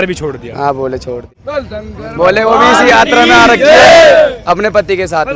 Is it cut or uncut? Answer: cut